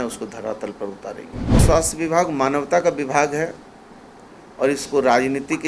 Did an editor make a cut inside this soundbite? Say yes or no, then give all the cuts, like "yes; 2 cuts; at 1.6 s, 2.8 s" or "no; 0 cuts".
yes; 1 cut; at 1.6 s